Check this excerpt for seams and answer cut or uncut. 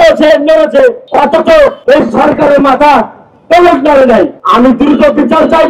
cut